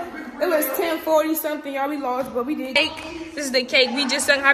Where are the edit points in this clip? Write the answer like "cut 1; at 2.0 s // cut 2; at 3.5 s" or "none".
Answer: cut 1; at 2.8 s